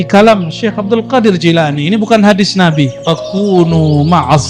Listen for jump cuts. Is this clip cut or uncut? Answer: cut